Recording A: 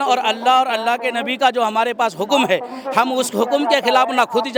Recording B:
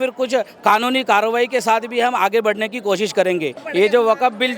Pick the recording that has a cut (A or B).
B